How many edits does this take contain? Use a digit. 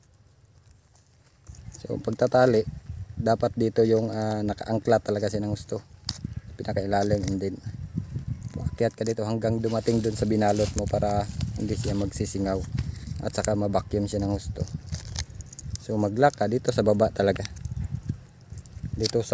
0